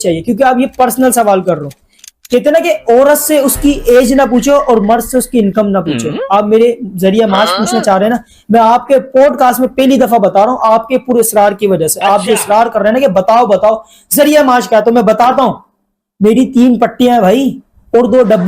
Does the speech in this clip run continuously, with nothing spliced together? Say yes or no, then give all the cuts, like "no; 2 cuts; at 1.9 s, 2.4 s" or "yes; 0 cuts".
yes; 0 cuts